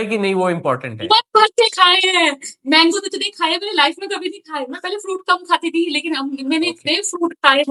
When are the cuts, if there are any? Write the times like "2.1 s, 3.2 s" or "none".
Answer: none